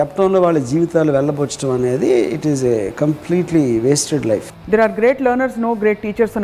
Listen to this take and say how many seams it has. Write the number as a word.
one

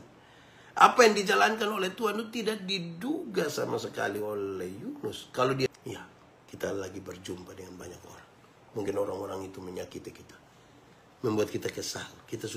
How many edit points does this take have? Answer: one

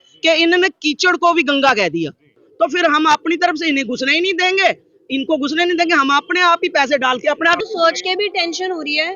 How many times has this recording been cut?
two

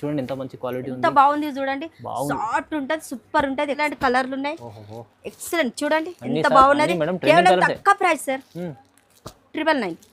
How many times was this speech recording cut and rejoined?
one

